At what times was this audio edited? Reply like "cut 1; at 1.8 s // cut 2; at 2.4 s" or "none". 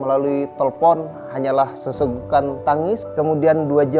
cut 1; at 3.1 s